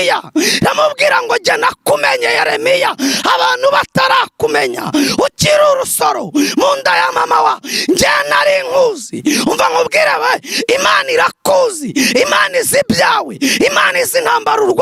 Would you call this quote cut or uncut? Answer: uncut